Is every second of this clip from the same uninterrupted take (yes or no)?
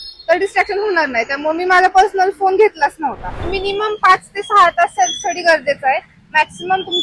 no